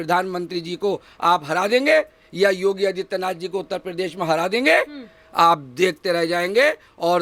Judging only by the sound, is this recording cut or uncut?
uncut